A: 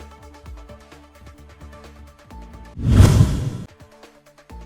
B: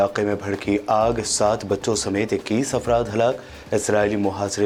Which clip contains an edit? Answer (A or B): A